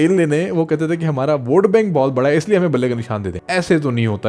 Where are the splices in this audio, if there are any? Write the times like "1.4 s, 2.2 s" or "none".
3.3 s